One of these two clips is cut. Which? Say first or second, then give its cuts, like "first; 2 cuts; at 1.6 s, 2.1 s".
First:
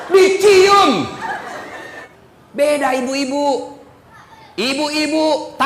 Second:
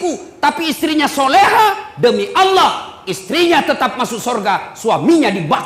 first; 1 cut; at 2.0 s